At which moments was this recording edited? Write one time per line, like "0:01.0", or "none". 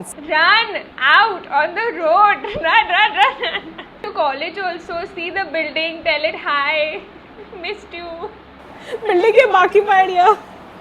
0:04.1

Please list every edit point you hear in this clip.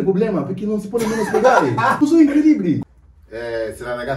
0:02.0
0:02.8

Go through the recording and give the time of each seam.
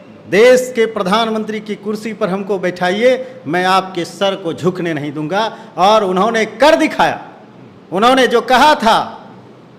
none

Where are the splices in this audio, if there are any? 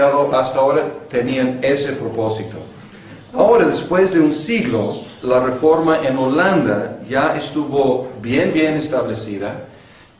0:02.7

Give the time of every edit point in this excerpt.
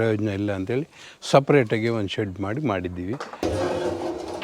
0:03.5

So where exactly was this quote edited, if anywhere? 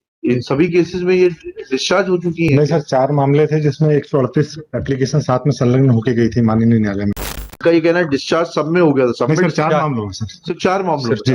0:07.5

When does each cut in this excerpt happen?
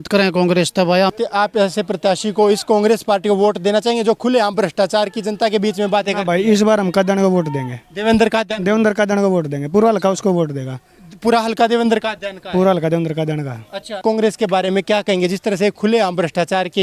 0:01.1
0:14.0

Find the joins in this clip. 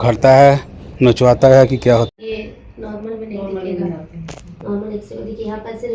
0:02.1

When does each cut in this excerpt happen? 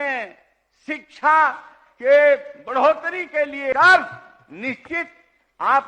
0:03.7

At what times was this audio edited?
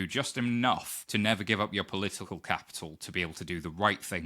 0:01.0

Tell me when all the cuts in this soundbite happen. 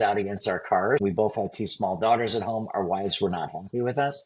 0:01.0

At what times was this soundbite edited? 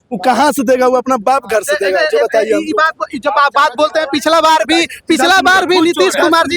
none

